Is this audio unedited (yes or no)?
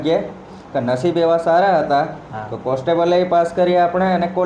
yes